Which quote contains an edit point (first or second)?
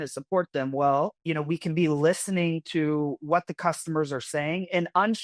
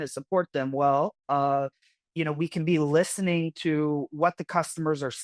first